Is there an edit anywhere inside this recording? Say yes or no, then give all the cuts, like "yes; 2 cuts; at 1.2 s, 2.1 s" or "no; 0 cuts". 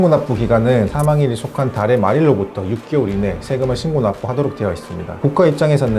yes; 2 cuts; at 0.9 s, 5.2 s